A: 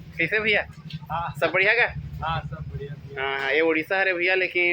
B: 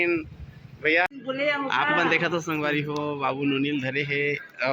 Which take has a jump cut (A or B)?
B